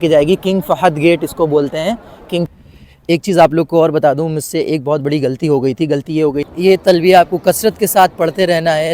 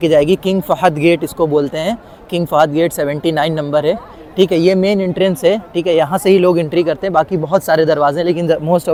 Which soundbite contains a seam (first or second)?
first